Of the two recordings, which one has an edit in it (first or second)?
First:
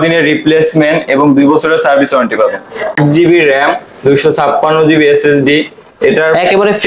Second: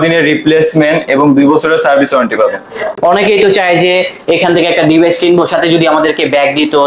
first